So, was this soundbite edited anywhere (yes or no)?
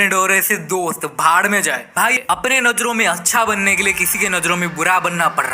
yes